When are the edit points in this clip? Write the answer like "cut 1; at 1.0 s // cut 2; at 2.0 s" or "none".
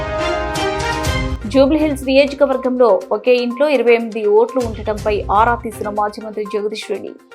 cut 1; at 1.3 s